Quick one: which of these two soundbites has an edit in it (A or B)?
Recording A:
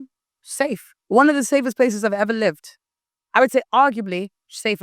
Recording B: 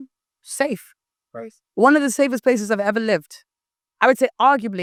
A